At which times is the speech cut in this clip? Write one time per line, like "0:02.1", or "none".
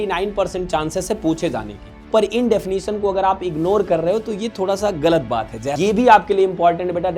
0:02.1
0:05.8